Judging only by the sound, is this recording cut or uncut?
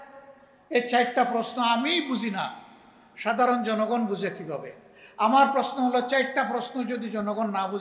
uncut